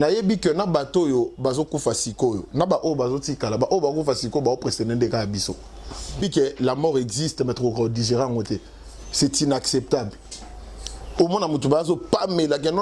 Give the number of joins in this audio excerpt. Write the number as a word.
one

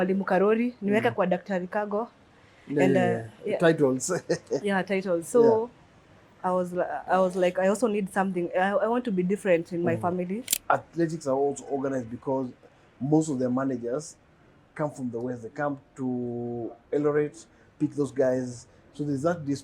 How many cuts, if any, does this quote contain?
one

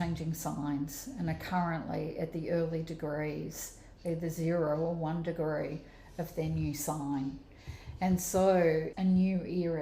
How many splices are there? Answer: one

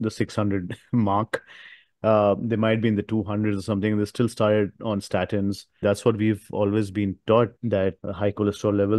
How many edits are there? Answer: two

